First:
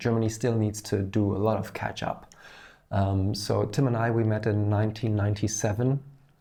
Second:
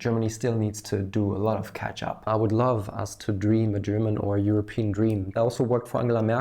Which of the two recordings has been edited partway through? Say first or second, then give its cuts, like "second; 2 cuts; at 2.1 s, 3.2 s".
second; 2 cuts; at 2.3 s, 5.4 s